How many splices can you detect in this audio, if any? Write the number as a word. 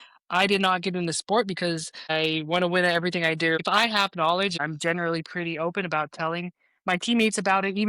three